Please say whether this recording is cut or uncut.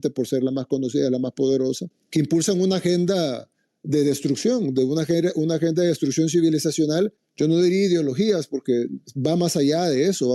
cut